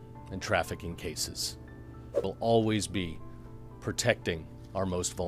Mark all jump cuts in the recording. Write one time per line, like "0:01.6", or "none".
0:02.2